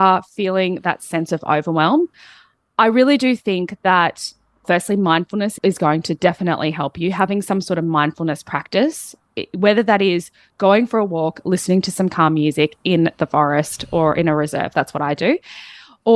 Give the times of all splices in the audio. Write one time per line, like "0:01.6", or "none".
none